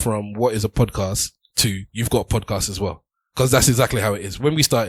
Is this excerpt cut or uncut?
uncut